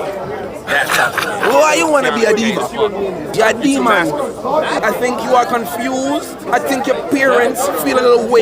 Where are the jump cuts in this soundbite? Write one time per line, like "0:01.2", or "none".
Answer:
0:03.3
0:04.8
0:06.5